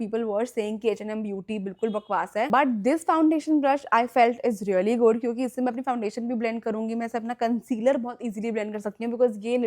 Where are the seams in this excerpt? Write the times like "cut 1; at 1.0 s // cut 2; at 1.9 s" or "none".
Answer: none

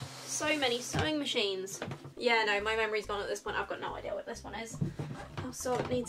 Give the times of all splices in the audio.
none

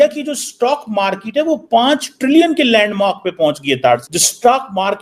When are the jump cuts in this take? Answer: cut 1; at 4.0 s

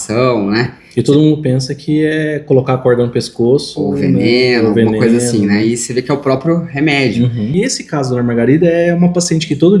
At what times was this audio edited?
cut 1; at 7.5 s

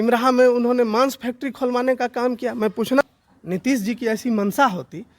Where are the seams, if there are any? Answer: cut 1; at 3.0 s

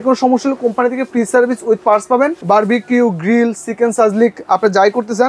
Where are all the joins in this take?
cut 1; at 2.4 s

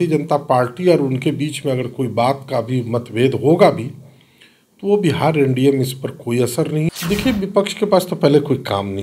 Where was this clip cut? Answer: cut 1; at 6.9 s

